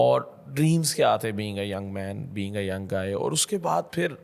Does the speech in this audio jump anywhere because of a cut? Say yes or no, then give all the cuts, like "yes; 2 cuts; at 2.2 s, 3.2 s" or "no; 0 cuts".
no; 0 cuts